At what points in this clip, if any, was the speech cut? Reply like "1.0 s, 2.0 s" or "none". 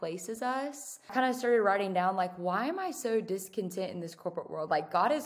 1.1 s